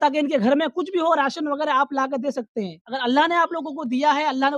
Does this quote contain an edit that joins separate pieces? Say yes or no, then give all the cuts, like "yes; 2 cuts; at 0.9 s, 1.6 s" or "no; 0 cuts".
yes; 1 cut; at 2.8 s